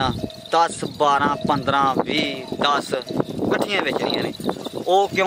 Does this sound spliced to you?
no; 0 cuts

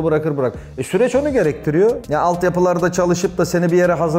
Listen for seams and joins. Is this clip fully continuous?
no; 1 cut; at 2.0 s

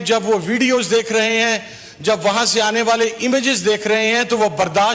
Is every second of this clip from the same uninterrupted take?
yes; 0 cuts

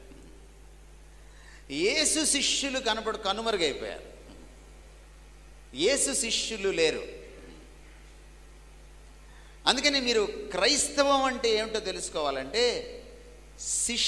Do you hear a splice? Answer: no; 0 cuts

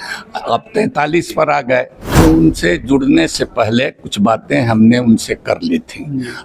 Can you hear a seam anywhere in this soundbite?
yes; 1 cut; at 2.1 s

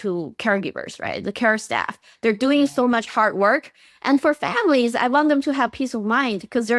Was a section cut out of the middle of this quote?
no; 0 cuts

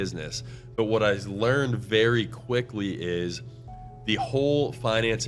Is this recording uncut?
yes; 0 cuts

